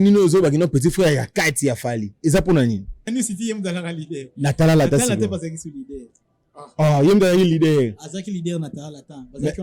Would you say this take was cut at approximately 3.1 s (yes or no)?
yes